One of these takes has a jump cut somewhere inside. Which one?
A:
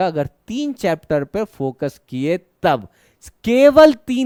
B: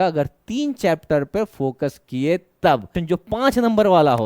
B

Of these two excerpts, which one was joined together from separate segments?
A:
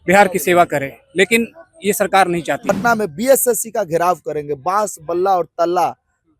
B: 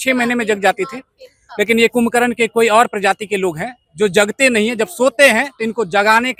A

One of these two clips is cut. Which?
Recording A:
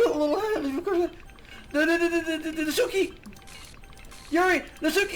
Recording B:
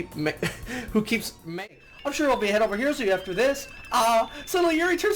B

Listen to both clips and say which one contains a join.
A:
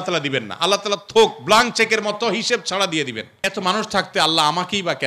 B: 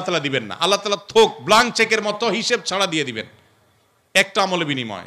A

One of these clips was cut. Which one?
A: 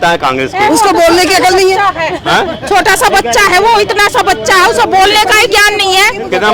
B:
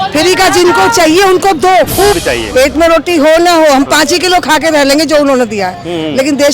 B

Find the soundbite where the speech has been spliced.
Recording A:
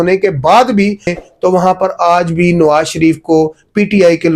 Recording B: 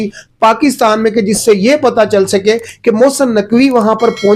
A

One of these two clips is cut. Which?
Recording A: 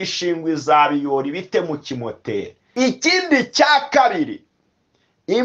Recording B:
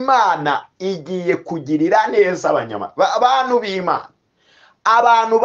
A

